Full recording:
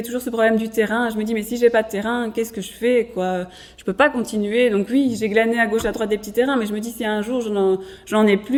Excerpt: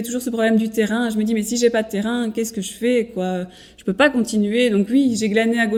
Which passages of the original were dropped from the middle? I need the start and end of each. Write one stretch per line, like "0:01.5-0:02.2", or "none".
none